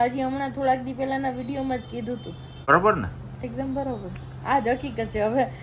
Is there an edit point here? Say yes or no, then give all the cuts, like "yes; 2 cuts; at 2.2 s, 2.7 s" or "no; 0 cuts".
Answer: yes; 1 cut; at 2.7 s